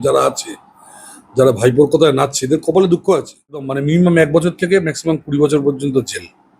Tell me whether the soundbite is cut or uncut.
cut